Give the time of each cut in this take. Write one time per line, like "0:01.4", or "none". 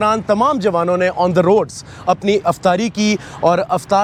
none